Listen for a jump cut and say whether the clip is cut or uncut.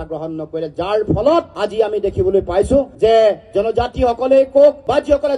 uncut